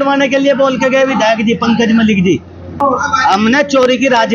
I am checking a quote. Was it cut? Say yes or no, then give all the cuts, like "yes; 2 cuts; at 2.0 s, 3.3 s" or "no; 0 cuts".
yes; 1 cut; at 2.7 s